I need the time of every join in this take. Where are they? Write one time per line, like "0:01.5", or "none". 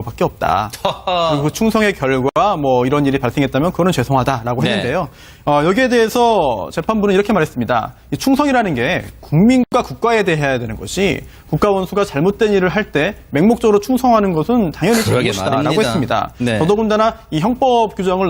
0:05.3